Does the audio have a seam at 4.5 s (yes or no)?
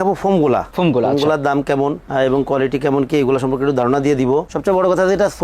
yes